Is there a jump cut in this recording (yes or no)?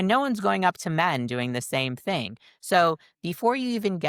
no